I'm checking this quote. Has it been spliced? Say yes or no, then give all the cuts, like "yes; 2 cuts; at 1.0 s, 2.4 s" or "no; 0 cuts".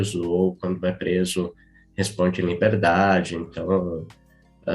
no; 0 cuts